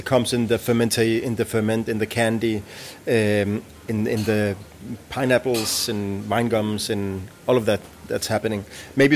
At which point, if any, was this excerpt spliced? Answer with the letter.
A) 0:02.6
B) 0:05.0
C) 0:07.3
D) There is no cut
D